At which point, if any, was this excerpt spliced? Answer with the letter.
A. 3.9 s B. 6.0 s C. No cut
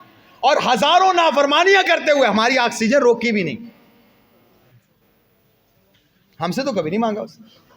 C